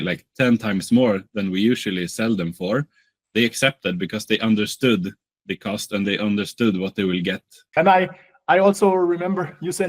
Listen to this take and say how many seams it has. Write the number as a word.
one